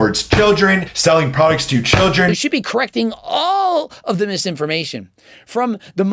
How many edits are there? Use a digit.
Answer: 1